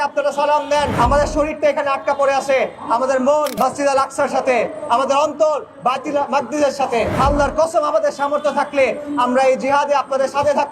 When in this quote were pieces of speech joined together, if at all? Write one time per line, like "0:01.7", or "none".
0:00.9
0:03.5
0:07.1